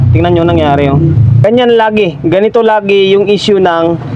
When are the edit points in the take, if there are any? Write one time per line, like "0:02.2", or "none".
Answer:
0:01.4